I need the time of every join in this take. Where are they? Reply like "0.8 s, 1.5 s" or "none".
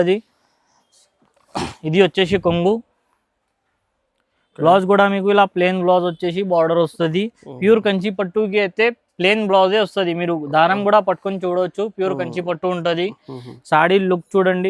none